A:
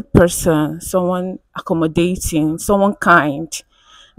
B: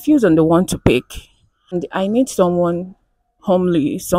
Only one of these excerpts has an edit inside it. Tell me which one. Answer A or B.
B